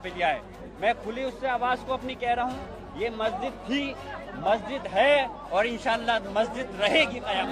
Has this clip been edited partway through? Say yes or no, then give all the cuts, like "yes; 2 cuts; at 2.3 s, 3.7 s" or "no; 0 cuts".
no; 0 cuts